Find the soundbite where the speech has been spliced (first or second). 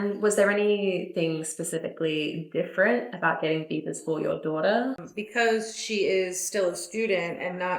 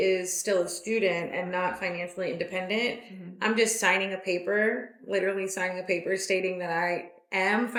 first